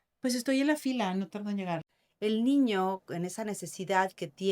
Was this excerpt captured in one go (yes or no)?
no